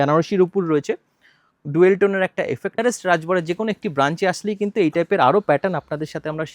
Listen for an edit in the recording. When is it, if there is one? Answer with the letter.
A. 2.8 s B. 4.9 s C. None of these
A